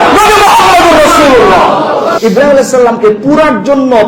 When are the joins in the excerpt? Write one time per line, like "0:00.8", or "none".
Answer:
0:02.2